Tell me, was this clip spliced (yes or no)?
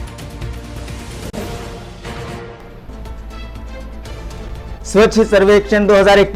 no